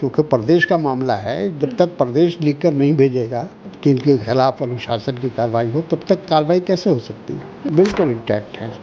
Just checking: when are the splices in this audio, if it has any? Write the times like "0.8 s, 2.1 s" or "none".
3.6 s, 7.6 s